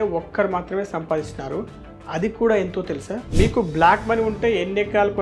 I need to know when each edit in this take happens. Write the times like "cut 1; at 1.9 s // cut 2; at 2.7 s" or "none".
cut 1; at 3.2 s